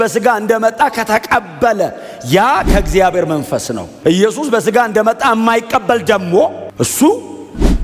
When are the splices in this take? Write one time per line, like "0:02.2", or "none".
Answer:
0:03.9
0:06.6